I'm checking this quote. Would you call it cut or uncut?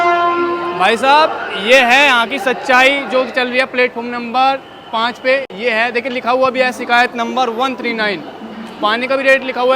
uncut